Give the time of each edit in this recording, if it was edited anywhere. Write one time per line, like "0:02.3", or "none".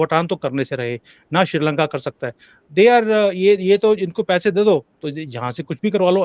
none